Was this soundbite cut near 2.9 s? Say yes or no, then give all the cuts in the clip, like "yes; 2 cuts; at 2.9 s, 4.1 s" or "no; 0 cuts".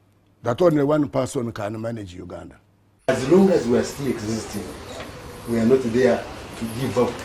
yes; 1 cut; at 2.9 s